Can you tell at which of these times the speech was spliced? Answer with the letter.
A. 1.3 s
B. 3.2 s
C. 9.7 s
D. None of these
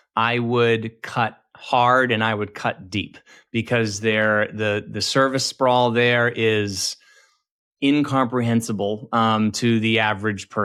D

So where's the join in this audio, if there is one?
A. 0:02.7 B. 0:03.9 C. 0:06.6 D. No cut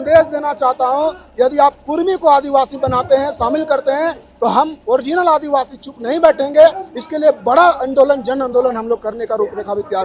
D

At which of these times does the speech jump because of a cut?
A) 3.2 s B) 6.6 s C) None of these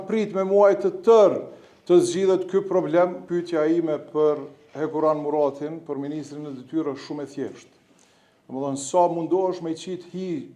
A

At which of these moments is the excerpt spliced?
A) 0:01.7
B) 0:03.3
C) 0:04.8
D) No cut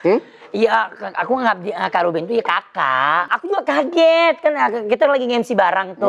B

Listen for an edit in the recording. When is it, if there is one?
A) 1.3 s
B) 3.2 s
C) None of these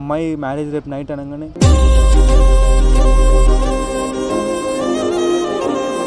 A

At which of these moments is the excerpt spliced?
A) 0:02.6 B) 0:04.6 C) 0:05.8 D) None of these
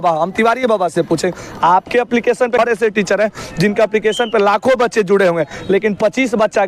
A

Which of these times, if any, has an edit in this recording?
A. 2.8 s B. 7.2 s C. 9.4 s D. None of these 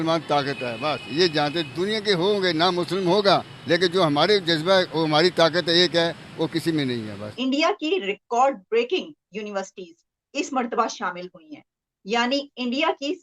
B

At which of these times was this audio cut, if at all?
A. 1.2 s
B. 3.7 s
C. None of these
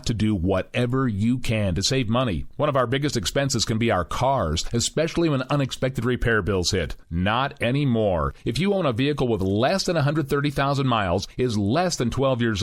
A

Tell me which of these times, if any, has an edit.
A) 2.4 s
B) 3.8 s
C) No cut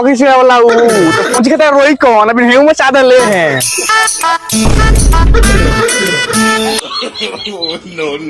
C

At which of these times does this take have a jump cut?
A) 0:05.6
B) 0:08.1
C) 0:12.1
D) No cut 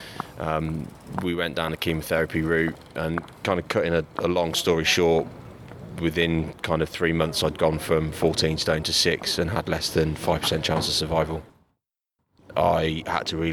C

